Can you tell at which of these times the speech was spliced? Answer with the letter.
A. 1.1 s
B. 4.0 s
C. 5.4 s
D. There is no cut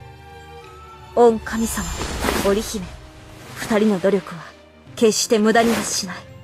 A